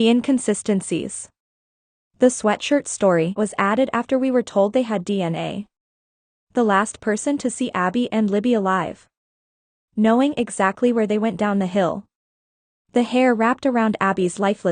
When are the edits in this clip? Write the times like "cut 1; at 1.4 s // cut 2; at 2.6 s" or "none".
cut 1; at 3.4 s